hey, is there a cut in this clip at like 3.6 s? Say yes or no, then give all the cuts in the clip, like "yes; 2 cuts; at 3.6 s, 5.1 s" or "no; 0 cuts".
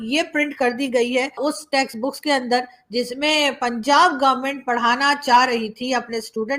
no; 0 cuts